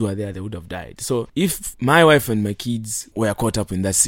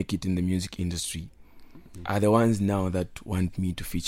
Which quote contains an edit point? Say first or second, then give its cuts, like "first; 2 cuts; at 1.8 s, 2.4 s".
first; 2 cuts; at 1.4 s, 3.0 s